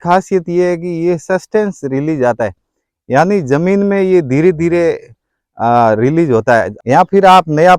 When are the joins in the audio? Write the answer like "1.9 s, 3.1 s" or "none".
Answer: 6.7 s